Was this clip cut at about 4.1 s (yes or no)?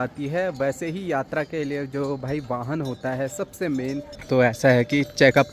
yes